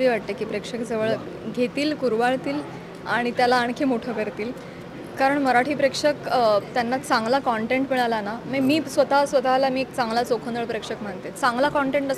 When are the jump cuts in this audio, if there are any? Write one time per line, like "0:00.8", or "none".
none